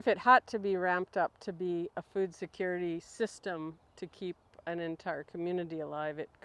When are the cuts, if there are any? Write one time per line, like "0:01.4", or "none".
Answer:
none